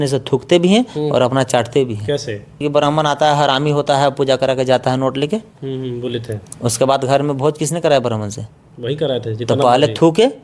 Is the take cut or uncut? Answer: cut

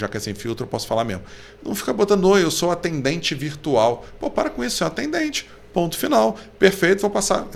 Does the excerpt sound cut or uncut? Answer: uncut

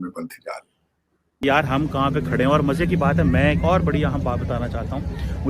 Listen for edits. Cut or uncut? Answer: cut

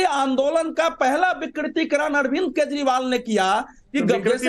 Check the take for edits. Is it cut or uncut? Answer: cut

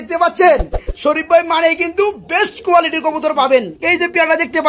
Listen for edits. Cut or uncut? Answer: cut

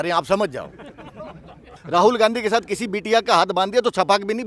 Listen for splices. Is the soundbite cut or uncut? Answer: cut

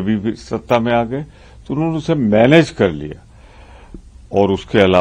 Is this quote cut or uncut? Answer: uncut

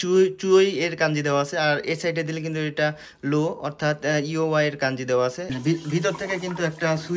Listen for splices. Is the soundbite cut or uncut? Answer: cut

